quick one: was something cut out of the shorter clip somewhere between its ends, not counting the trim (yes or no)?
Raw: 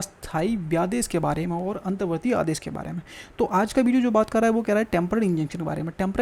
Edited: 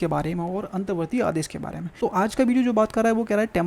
yes